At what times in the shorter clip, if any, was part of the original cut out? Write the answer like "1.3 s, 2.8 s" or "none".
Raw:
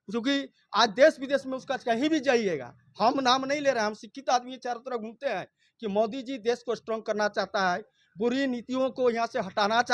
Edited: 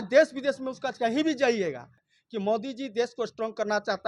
2.0 s